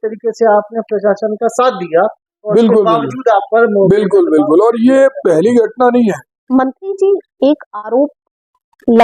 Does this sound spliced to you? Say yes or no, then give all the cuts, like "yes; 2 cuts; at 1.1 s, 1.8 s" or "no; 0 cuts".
yes; 1 cut; at 6.3 s